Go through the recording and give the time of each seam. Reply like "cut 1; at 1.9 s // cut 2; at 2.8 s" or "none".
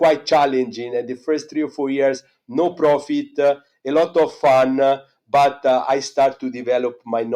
none